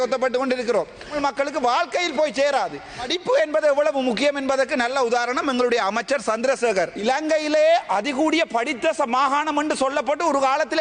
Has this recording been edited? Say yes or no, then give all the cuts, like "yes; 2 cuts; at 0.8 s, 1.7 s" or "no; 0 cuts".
yes; 3 cuts; at 1.1 s, 3.1 s, 7.0 s